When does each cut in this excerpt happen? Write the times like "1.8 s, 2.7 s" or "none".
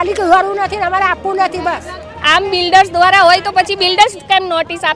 2.1 s